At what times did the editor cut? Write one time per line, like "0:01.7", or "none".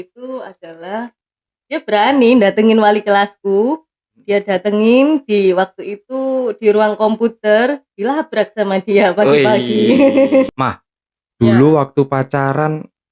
0:10.5